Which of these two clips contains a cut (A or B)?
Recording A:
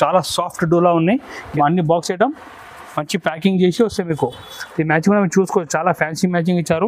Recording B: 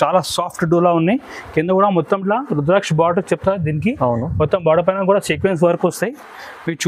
A